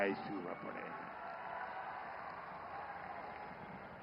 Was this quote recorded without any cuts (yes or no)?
yes